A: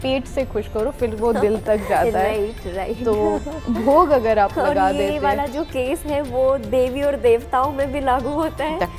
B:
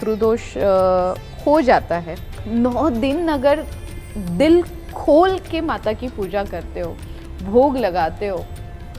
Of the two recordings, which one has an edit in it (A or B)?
B